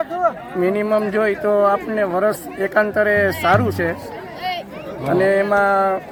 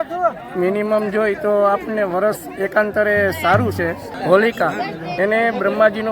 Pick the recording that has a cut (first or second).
second